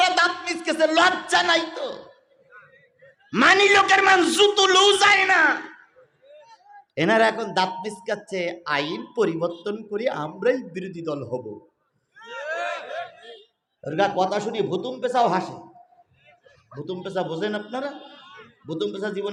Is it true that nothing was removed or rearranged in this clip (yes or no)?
yes